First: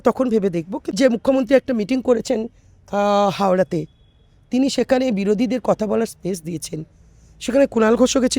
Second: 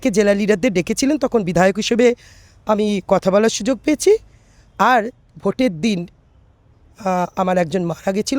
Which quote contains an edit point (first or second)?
first